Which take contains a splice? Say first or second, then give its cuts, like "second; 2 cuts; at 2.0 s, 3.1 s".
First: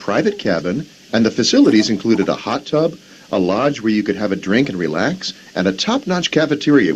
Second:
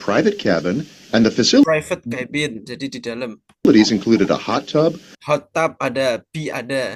first; 3 cuts; at 1.6 s, 3.1 s, 5.6 s